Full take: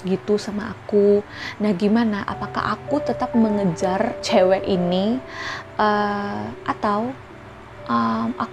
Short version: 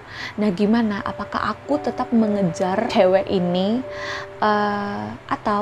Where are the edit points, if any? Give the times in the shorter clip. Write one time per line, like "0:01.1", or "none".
0:02.9